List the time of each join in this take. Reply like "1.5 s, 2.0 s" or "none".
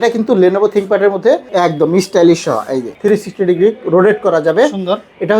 1.5 s, 2.9 s